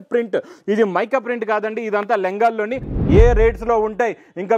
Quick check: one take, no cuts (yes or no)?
no